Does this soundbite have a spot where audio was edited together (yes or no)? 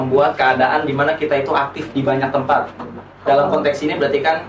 no